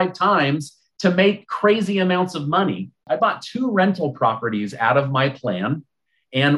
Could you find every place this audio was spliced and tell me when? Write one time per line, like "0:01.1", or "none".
0:03.0